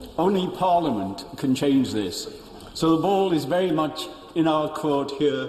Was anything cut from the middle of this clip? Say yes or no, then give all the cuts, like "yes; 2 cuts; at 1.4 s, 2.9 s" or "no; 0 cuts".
no; 0 cuts